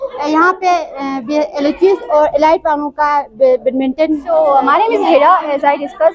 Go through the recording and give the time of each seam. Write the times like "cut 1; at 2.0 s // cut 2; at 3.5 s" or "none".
cut 1; at 4.2 s